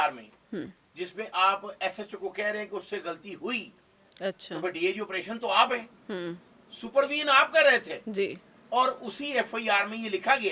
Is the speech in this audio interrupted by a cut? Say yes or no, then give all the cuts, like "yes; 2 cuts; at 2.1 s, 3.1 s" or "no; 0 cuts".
no; 0 cuts